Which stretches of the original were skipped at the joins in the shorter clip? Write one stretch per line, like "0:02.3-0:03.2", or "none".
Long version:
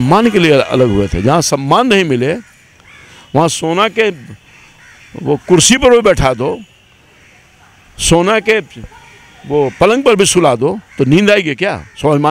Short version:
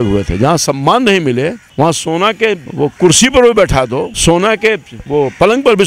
0:02.5-0:03.2
0:04.2-0:05.2
0:06.6-0:08.0
0:08.8-0:09.3